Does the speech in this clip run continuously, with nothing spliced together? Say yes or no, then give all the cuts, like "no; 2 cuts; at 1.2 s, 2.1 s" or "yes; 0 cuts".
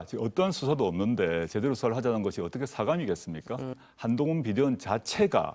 no; 1 cut; at 3.8 s